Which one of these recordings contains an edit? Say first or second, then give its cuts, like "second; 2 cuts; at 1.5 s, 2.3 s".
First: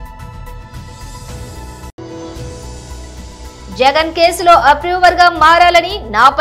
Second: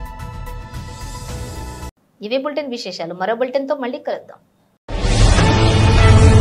first; 2 cuts; at 1.9 s, 3.7 s